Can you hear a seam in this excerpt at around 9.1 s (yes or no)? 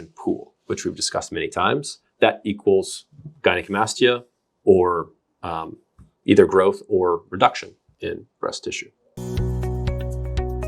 yes